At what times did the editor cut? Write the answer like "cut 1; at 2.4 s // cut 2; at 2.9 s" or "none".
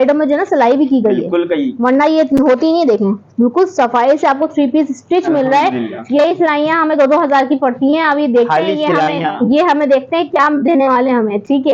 none